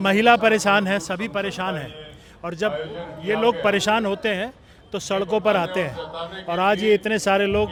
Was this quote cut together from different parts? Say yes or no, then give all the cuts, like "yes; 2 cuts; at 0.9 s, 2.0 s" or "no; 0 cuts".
no; 0 cuts